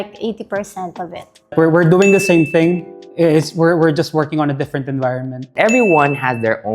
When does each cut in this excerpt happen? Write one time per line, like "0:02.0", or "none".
0:01.5
0:05.5